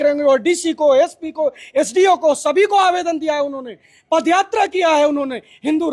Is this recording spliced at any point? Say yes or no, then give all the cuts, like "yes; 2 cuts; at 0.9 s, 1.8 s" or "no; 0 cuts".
no; 0 cuts